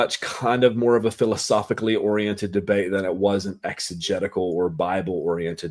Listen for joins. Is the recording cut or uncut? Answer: uncut